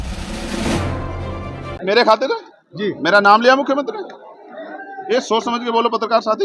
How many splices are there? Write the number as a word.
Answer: one